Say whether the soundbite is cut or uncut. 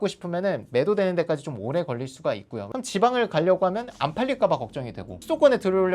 cut